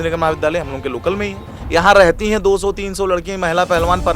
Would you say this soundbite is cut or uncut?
cut